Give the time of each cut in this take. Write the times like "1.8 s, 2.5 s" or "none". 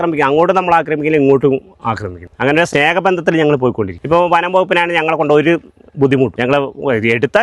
2.6 s, 4.0 s, 6.3 s